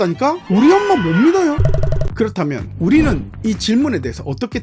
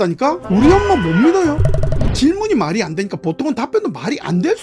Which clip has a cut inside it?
first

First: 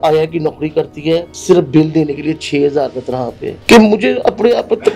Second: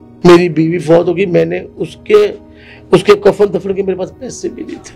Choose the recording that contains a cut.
first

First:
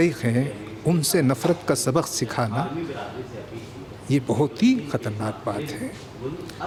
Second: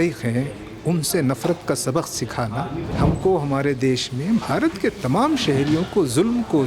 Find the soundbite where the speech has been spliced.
second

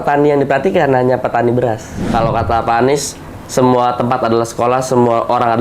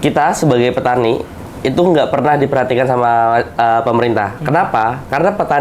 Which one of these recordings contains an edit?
first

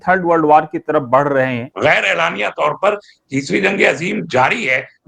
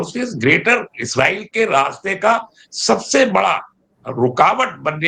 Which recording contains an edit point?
first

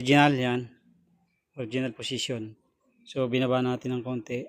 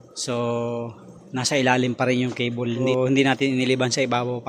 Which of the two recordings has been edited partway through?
second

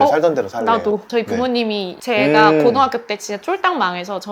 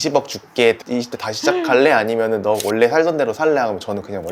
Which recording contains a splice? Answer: first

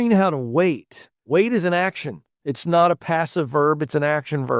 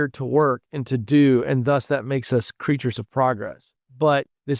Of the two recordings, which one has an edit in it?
first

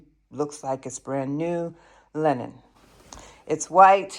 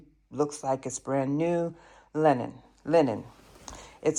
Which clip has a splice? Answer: first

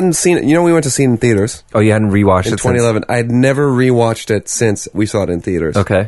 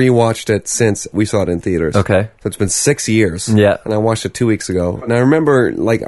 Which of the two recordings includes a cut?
second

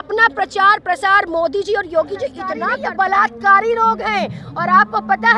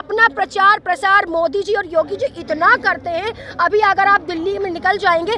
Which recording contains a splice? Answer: first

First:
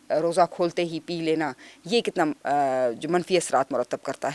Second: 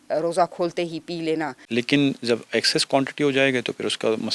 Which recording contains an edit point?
second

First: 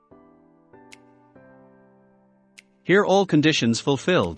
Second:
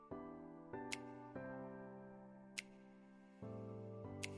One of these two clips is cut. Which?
first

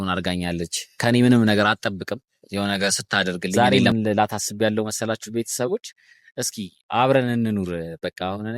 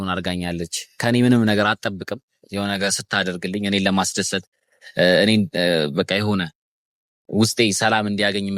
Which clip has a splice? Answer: first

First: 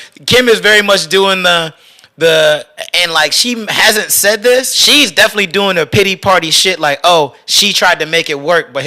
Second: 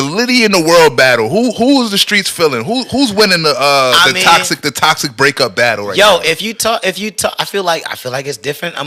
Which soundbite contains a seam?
first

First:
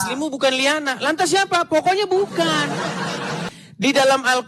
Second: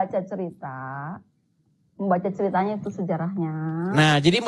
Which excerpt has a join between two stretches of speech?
first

